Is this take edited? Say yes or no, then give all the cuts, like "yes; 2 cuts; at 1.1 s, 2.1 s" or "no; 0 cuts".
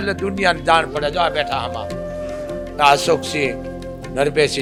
no; 0 cuts